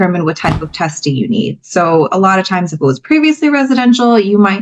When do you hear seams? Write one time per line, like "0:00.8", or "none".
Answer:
none